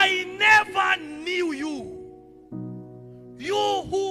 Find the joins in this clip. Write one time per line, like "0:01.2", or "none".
none